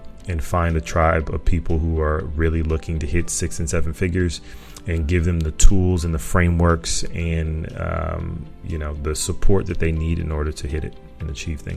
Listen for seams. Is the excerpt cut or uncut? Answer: uncut